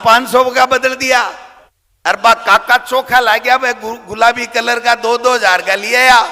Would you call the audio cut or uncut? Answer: uncut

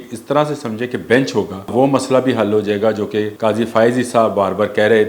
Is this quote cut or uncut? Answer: cut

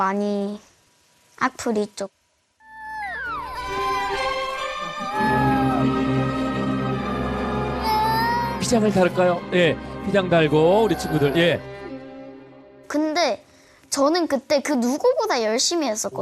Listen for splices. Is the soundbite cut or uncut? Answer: uncut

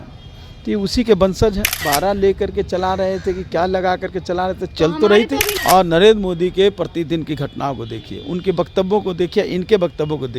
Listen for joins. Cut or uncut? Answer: cut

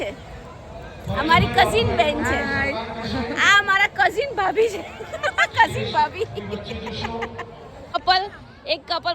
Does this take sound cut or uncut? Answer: cut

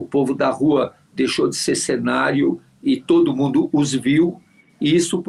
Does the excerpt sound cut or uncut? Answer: uncut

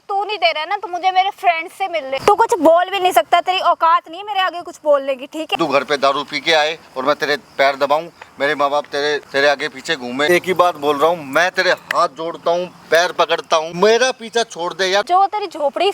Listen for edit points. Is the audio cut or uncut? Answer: cut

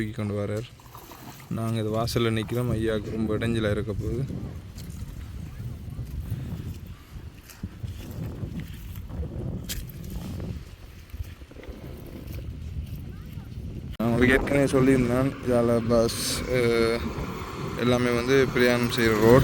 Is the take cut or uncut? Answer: cut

